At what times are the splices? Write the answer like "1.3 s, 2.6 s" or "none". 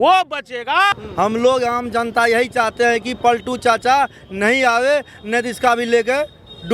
1.0 s